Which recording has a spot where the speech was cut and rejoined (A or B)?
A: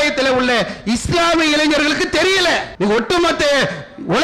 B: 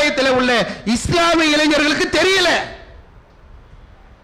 A